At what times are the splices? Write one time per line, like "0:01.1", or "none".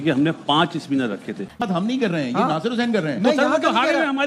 0:01.6